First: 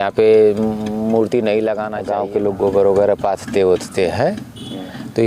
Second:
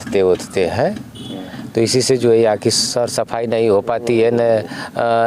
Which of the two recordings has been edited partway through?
first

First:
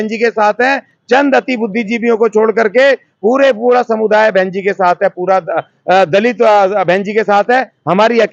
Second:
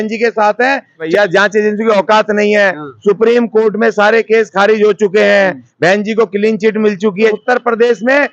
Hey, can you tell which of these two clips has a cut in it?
second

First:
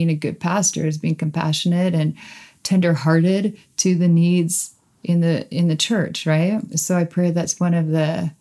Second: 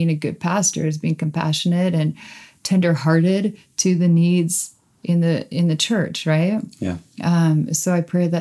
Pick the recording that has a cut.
first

